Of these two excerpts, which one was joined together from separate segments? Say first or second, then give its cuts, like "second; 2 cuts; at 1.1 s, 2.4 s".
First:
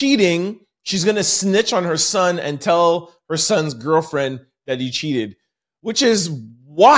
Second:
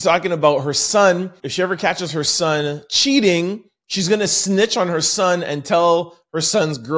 second; 1 cut; at 1.4 s